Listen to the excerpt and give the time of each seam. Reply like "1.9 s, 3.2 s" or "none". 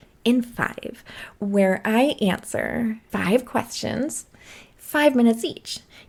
none